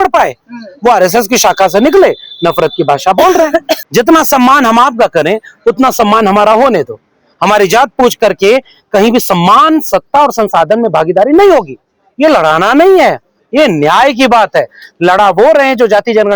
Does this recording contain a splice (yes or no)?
yes